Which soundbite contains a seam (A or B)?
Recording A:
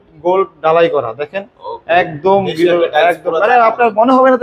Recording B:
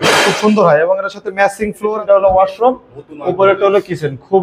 B